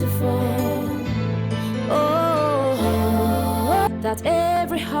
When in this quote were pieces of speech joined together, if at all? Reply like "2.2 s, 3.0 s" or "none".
3.9 s